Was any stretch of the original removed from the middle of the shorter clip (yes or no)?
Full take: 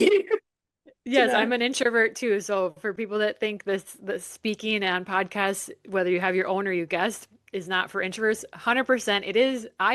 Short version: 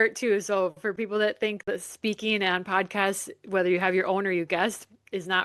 yes